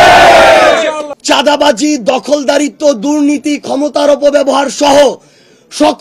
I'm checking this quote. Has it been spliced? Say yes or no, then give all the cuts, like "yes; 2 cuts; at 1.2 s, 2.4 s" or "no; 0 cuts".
yes; 1 cut; at 1.1 s